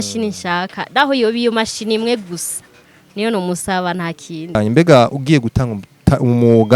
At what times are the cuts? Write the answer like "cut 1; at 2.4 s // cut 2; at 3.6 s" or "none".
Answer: cut 1; at 4.6 s